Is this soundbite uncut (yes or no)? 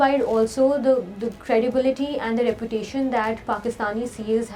yes